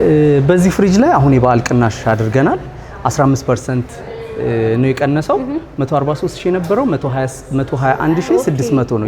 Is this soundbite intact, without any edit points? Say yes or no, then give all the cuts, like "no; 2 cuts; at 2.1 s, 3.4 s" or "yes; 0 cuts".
yes; 0 cuts